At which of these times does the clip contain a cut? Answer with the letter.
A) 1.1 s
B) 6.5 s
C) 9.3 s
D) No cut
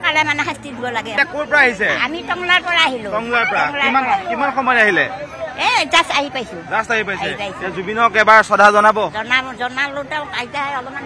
A